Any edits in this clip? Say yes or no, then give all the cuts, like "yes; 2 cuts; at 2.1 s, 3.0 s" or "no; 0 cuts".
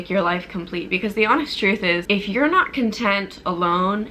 yes; 1 cut; at 2.0 s